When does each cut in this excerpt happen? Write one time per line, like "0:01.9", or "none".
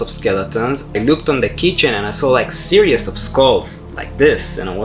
0:00.9